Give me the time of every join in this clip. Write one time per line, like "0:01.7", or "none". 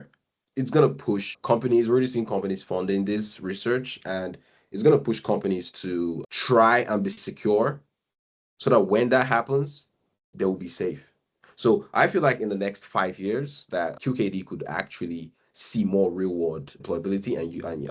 0:01.3
0:06.2
0:16.7